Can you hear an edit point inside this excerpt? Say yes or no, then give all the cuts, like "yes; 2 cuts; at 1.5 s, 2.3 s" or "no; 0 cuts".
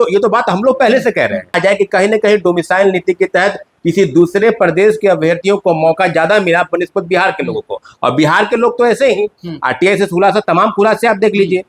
yes; 1 cut; at 1.6 s